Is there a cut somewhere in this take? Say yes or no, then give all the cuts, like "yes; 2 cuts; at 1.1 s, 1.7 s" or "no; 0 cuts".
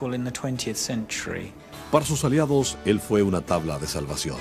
no; 0 cuts